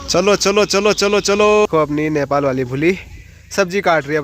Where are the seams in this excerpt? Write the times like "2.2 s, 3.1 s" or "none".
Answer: 1.7 s